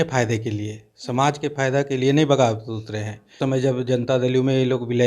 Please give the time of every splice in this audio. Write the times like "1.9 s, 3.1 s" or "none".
3.4 s